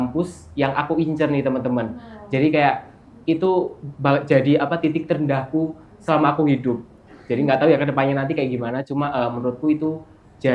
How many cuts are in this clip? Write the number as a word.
zero